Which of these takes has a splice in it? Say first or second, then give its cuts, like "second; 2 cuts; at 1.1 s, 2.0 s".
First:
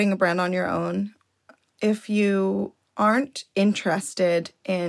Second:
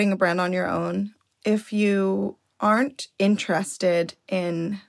second; 1 cut; at 1.2 s